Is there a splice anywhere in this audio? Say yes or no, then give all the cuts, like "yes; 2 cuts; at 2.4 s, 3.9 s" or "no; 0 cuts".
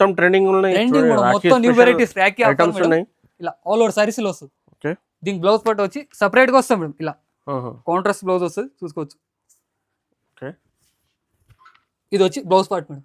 no; 0 cuts